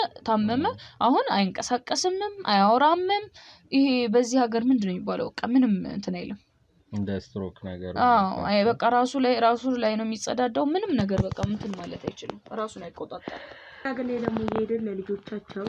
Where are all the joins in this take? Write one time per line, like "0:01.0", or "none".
0:13.8

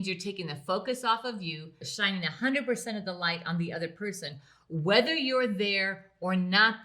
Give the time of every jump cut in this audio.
0:01.8

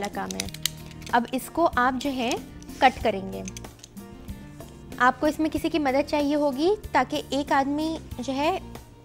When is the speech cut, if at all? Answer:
0:03.5
0:05.0

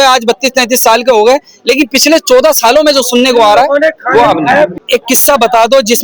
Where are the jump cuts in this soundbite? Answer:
0:04.8

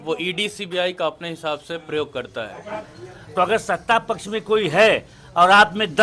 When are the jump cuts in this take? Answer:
0:02.9

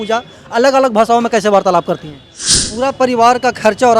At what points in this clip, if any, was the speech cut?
0:02.6

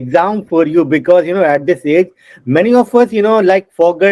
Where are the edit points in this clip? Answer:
none

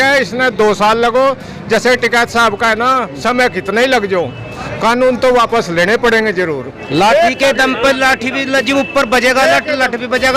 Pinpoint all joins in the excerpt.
0:06.7

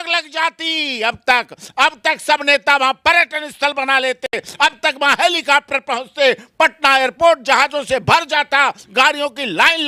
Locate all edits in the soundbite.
none

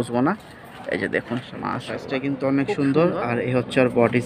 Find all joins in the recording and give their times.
0:02.1

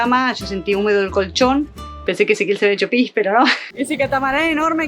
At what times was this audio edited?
0:03.6

